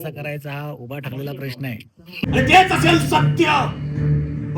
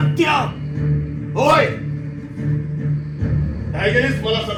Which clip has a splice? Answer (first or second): first